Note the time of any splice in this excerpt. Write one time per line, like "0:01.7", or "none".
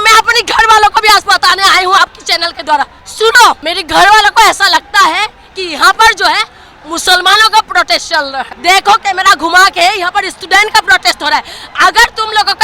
0:03.0
0:03.7
0:08.5